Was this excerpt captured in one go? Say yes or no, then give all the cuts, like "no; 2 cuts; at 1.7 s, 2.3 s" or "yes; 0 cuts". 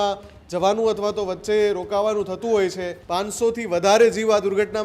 no; 1 cut; at 2.9 s